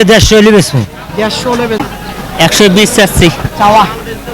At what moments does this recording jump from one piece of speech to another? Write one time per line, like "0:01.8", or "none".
0:01.9